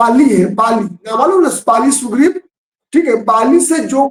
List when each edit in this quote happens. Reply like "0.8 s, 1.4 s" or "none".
none